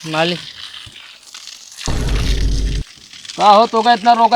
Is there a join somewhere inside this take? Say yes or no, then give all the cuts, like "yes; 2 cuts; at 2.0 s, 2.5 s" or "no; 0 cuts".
yes; 2 cuts; at 1.8 s, 2.8 s